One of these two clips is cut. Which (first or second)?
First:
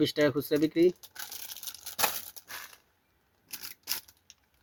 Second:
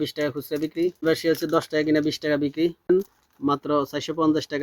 second